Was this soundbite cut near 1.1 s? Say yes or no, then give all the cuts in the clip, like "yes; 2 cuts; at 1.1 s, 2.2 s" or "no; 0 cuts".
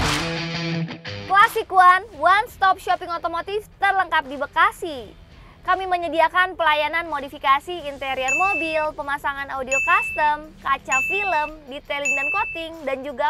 yes; 1 cut; at 1.1 s